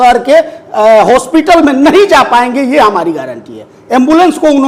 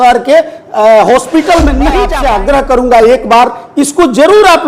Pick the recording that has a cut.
second; 1 cut; at 2.1 s

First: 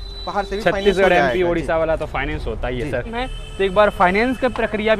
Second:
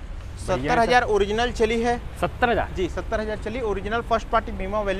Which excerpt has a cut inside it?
first; 1 cut; at 3.2 s

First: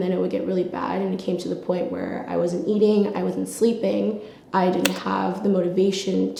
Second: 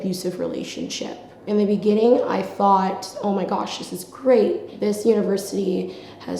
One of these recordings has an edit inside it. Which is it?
second; 1 cut; at 4.7 s

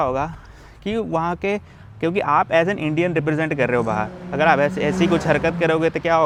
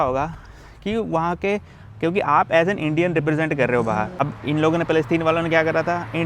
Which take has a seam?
second; 1 cut; at 4.1 s

